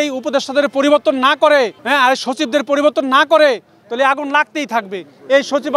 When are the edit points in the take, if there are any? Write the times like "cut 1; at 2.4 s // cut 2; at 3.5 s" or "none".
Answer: none